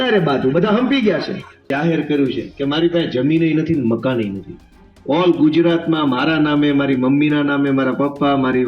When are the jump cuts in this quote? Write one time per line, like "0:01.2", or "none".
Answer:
0:01.7

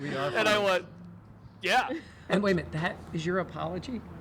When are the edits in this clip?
0:02.1

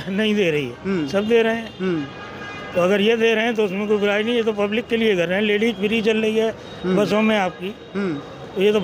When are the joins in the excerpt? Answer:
none

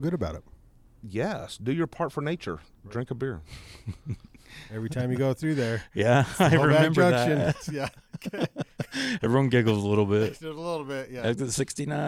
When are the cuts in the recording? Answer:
0:04.6

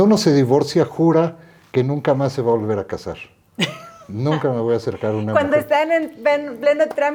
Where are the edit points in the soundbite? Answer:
none

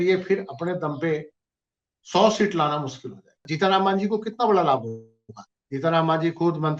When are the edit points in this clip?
0:03.5

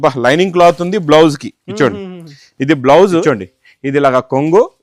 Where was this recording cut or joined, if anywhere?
0:03.2

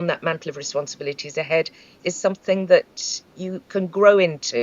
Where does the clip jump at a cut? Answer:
0:01.9

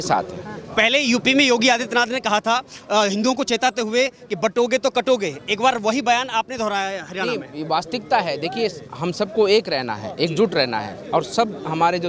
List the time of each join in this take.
none

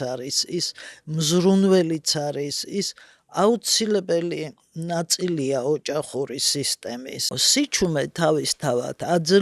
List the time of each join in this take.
0:07.4

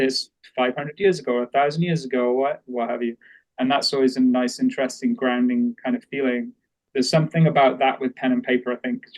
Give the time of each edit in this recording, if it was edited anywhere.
0:06.8

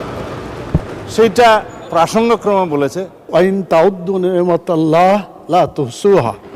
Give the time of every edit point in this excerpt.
0:03.3

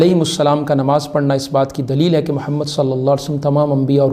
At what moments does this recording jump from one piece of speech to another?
none

